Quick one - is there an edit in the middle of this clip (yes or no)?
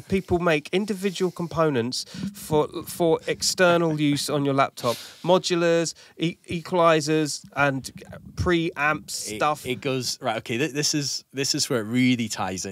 no